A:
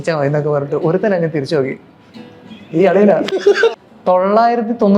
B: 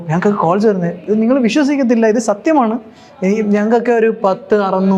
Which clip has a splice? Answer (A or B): A